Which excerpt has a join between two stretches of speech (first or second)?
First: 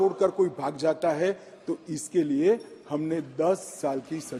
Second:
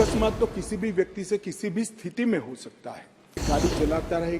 second